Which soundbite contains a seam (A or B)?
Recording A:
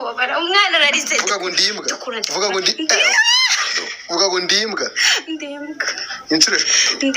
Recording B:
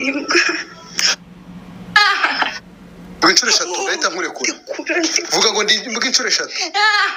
A